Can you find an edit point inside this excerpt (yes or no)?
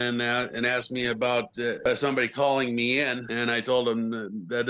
no